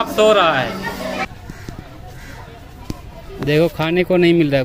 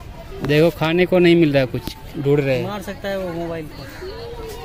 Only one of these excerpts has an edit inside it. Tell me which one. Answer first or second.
first